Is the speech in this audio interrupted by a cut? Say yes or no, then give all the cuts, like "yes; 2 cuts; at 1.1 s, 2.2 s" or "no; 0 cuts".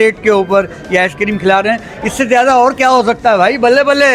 no; 0 cuts